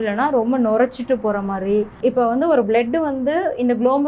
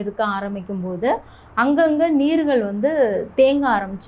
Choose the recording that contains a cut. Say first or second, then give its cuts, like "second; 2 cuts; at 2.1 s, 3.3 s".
first; 1 cut; at 1.9 s